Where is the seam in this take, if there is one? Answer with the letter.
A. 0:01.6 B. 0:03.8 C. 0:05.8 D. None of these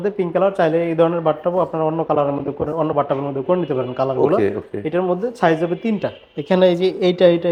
D